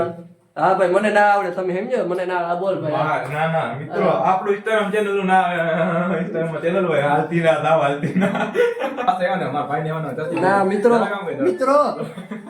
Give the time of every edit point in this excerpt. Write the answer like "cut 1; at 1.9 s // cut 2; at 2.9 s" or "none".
cut 1; at 9.1 s